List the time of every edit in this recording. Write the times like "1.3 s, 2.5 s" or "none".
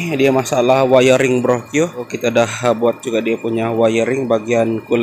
2.0 s